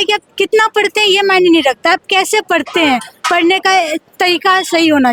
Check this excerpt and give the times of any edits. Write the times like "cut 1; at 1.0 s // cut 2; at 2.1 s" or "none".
none